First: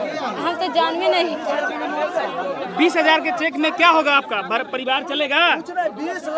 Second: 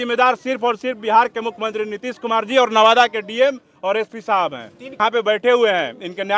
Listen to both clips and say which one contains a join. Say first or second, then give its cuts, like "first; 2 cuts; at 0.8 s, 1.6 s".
second; 1 cut; at 5.0 s